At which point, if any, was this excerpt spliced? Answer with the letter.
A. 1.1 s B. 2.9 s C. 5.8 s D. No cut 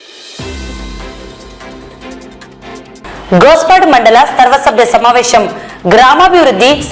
B